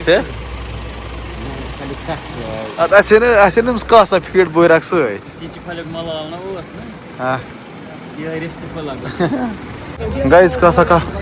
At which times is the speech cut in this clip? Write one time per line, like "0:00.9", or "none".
0:09.9